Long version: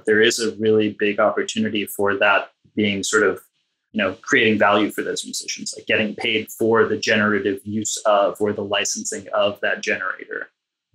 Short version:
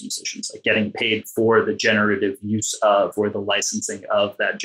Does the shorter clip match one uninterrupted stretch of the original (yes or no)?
yes